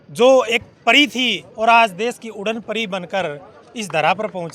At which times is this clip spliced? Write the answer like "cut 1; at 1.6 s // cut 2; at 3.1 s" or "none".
none

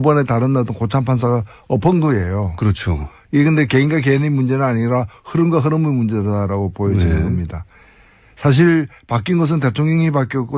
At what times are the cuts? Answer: none

